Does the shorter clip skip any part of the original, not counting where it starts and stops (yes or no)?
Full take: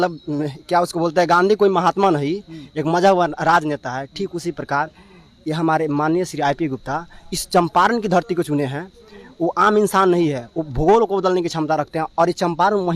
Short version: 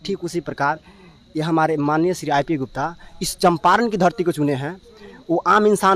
no